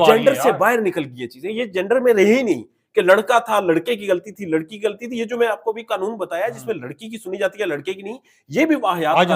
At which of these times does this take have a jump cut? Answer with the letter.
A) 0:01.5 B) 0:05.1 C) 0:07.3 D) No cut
D